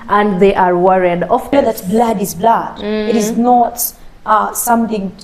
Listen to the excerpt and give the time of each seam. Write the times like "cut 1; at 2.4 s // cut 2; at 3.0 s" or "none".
cut 1; at 1.5 s